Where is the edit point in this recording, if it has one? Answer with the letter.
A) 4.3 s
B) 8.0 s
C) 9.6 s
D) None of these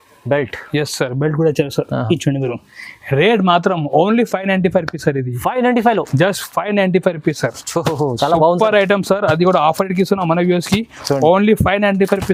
D